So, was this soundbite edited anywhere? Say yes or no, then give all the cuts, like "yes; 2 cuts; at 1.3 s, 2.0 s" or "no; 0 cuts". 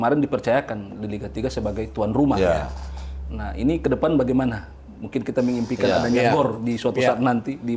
no; 0 cuts